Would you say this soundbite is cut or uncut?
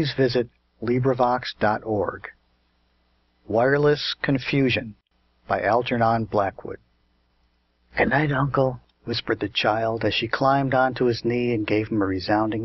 cut